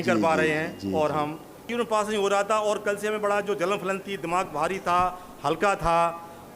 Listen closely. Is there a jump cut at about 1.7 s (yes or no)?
yes